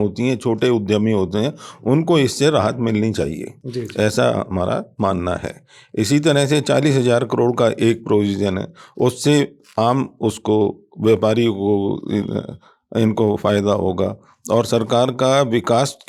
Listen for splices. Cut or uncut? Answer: uncut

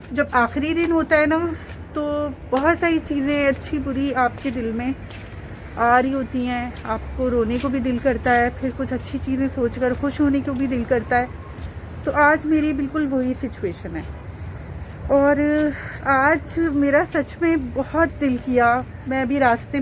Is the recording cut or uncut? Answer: uncut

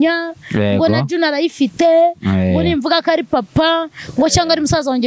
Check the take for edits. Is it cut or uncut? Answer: uncut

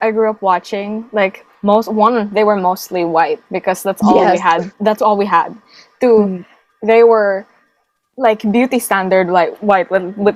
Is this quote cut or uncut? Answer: uncut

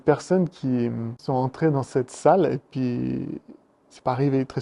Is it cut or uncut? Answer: cut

